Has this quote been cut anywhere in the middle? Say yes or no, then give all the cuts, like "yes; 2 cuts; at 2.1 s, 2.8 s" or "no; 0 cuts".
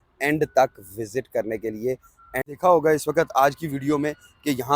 yes; 1 cut; at 2.4 s